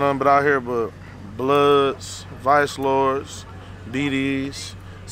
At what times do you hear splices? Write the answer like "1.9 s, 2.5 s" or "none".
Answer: none